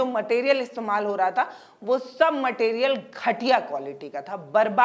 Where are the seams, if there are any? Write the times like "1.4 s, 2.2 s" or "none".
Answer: none